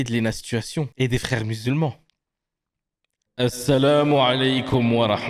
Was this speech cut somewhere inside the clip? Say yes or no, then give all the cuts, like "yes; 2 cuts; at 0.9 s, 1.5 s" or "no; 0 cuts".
no; 0 cuts